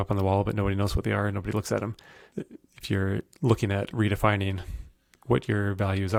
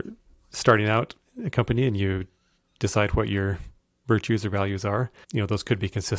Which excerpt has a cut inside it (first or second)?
second